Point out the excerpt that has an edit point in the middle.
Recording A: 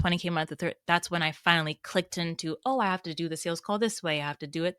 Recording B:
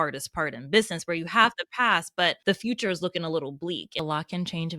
B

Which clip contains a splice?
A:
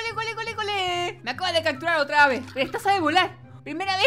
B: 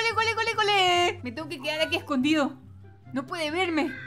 A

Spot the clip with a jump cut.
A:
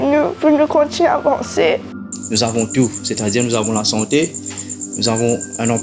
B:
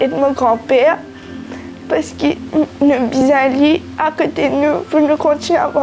A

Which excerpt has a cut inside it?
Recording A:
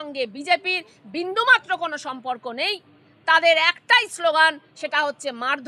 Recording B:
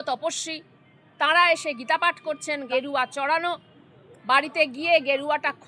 B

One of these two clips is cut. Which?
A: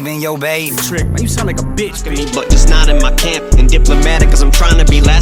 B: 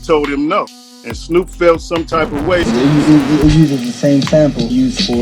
B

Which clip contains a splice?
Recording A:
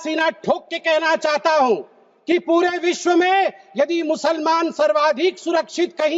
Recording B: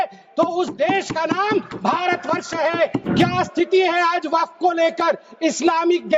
B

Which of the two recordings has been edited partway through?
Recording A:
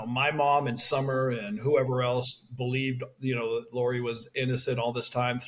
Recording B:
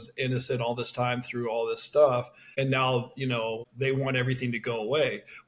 B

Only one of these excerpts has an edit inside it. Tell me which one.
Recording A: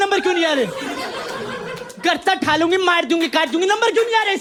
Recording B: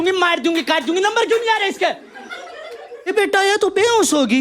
B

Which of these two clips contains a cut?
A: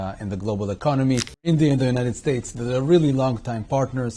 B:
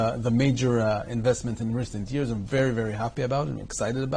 A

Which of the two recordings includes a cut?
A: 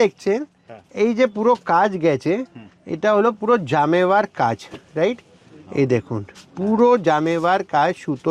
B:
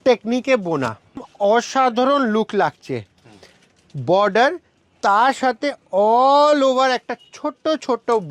B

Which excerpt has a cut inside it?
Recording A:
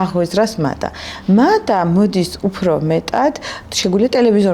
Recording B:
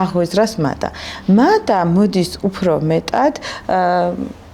A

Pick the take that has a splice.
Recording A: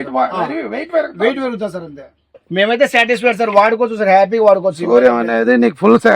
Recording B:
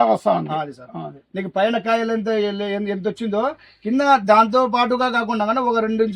A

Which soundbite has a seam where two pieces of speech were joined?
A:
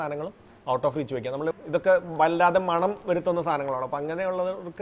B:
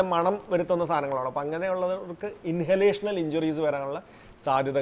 A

